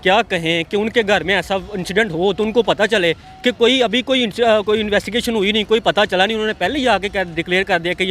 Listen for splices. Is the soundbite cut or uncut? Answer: uncut